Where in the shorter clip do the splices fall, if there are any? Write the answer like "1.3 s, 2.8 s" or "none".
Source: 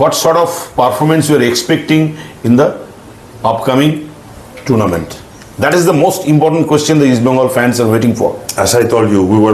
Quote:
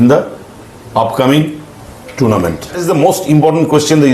2.8 s